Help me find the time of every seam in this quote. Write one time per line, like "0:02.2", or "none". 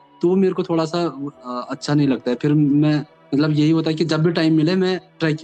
none